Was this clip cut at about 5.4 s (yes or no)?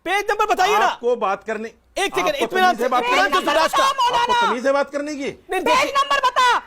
no